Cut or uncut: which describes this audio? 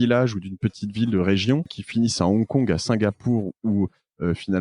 cut